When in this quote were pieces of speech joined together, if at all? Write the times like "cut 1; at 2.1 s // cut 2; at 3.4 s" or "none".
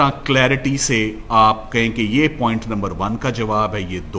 none